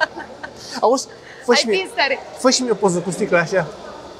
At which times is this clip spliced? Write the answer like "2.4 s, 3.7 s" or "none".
none